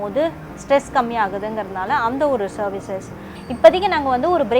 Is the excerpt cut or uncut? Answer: cut